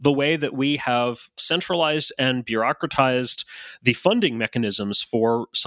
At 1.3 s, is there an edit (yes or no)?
yes